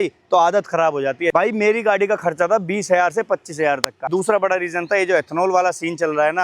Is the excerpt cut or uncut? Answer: cut